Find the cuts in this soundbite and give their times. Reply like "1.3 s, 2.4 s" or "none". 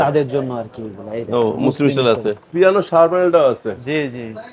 2.5 s